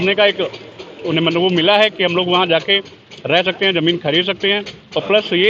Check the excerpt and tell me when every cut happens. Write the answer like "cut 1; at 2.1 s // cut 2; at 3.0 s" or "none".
none

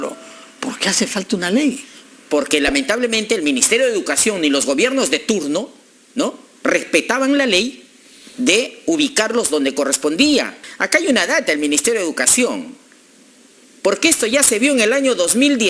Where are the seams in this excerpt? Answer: none

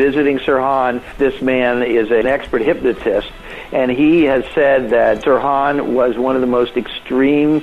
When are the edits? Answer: cut 1; at 1.1 s // cut 2; at 2.2 s // cut 3; at 5.2 s

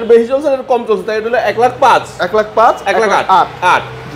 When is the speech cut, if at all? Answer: none

